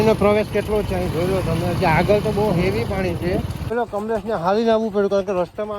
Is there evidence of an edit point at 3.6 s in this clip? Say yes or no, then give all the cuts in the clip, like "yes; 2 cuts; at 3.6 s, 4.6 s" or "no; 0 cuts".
yes; 1 cut; at 3.6 s